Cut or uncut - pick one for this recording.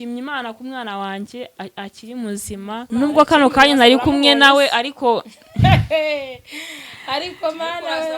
cut